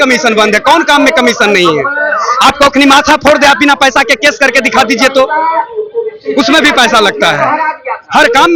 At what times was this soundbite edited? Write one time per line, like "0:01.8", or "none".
none